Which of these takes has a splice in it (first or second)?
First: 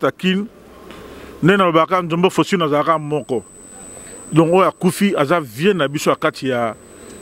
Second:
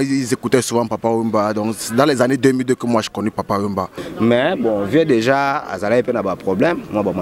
second